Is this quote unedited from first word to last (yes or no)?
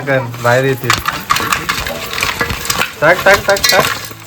yes